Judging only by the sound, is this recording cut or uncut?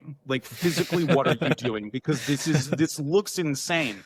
uncut